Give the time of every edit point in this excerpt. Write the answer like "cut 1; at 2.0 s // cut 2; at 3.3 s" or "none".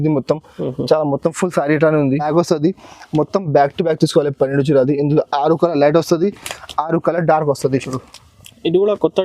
cut 1; at 2.3 s

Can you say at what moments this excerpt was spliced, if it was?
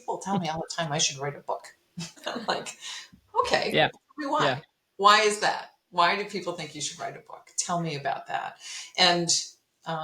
cut 1; at 2.2 s

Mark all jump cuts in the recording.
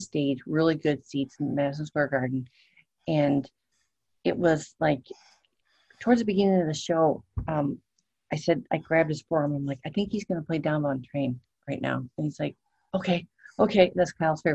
none

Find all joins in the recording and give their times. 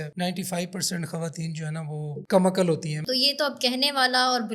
cut 1; at 3.0 s

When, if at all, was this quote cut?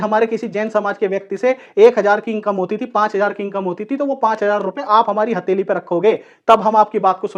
none

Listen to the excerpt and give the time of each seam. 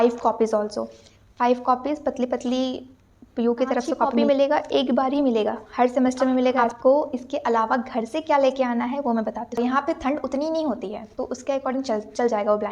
cut 1; at 4.2 s // cut 2; at 6.7 s // cut 3; at 9.6 s

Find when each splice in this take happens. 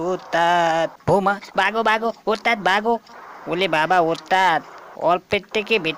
cut 1; at 1.0 s

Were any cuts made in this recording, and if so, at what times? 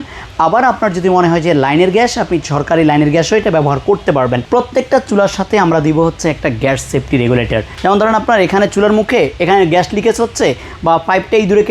cut 1; at 4.4 s // cut 2; at 7.7 s

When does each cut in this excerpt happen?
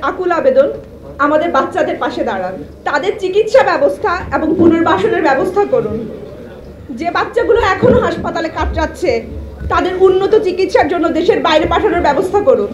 cut 1; at 2.7 s

